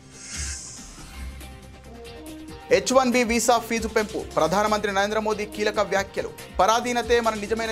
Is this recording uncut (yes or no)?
yes